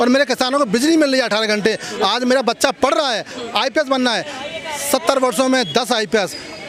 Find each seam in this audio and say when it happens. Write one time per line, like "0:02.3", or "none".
none